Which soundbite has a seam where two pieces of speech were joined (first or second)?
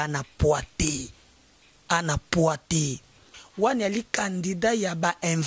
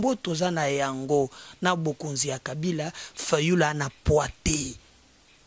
first